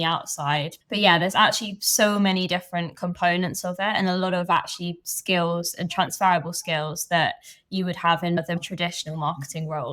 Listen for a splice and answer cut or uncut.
uncut